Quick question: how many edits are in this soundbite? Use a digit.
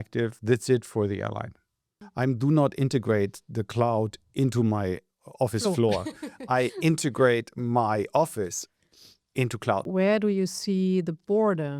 2